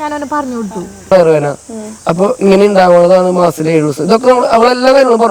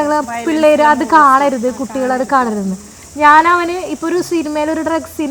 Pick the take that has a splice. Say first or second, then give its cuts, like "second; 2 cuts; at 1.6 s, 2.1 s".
first; 1 cut; at 1.1 s